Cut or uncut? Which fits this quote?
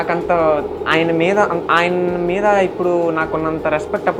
uncut